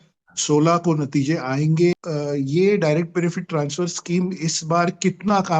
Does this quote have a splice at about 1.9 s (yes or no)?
yes